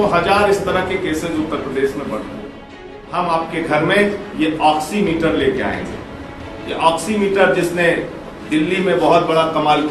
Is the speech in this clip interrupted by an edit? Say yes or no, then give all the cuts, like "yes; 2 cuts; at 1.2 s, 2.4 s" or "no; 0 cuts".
yes; 1 cut; at 3.0 s